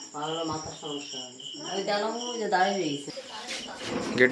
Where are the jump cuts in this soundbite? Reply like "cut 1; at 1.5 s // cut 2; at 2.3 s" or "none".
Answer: cut 1; at 3.1 s